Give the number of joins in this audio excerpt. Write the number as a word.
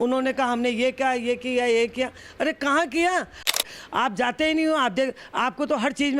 one